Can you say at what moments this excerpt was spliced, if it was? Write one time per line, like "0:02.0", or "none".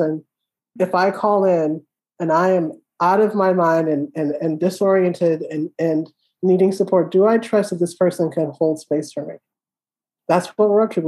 0:10.1